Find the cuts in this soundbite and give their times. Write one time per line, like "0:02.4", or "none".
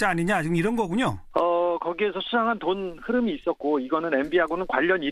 none